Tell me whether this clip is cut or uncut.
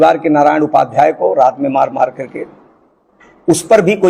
uncut